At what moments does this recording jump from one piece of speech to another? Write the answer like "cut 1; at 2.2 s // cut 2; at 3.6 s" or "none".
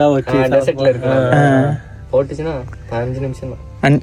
none